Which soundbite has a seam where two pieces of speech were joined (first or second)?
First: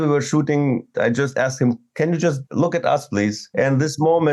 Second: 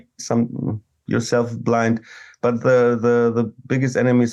first